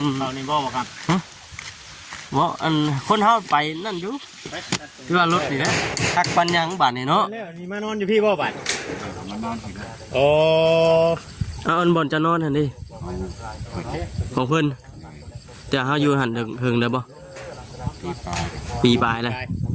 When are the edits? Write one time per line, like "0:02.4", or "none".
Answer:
0:05.7